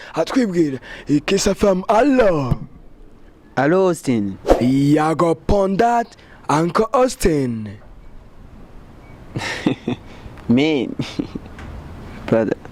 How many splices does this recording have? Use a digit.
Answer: 1